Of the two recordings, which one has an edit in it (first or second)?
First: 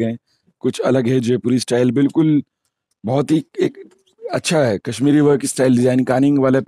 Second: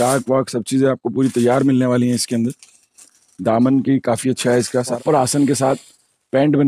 second